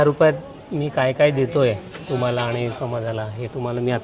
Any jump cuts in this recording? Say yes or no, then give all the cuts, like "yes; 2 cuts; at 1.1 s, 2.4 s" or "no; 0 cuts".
no; 0 cuts